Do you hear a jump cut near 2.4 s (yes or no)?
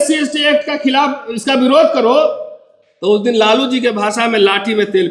no